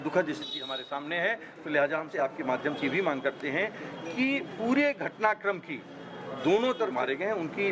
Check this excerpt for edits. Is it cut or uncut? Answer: cut